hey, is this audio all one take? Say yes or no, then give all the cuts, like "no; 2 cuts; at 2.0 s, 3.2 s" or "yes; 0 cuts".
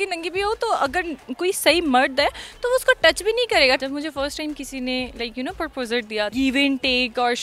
no; 3 cuts; at 1.3 s, 3.8 s, 6.3 s